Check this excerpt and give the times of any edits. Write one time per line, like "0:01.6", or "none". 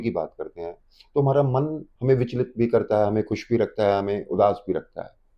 0:01.9